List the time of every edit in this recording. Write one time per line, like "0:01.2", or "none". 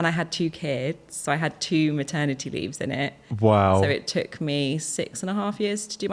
none